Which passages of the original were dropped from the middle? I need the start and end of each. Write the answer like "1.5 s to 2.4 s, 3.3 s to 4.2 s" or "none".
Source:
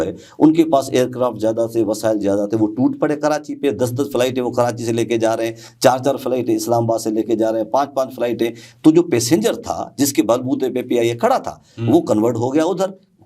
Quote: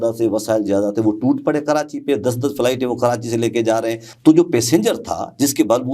5.6 s to 8.7 s